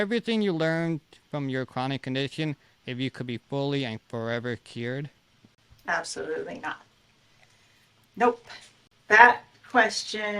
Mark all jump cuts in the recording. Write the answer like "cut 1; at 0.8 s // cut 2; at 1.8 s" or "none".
none